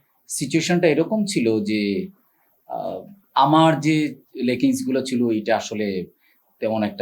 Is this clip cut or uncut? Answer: uncut